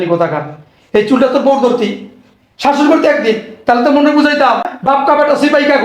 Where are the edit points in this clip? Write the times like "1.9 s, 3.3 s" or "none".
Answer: 4.7 s